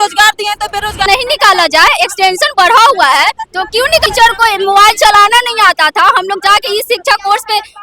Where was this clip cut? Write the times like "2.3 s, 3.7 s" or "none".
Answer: 1.1 s, 4.0 s